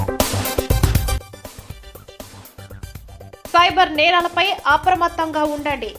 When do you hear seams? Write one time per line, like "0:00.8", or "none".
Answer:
0:01.2
0:02.4

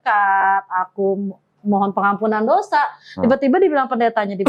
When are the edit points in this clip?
none

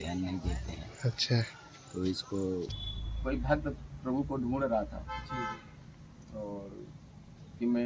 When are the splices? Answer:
0:02.8

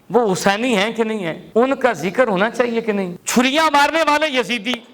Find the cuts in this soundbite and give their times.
0:01.4
0:03.1

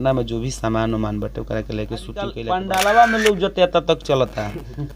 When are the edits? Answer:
0:02.4

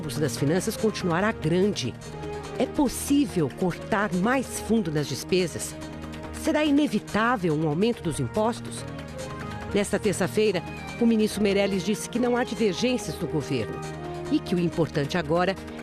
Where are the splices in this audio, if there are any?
none

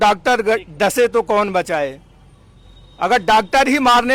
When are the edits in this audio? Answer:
none

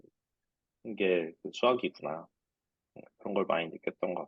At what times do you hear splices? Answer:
none

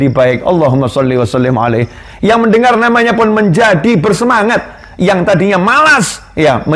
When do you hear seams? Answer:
none

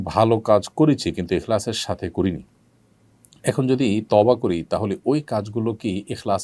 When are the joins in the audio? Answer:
none

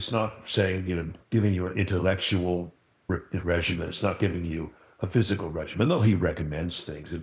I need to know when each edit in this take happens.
0:01.1
0:03.1

